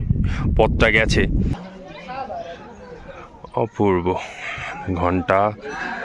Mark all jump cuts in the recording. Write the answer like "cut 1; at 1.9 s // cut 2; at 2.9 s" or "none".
cut 1; at 1.6 s